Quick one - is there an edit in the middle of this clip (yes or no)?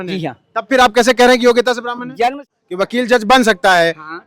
yes